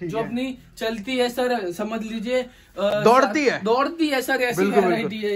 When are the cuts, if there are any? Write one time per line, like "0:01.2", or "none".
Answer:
none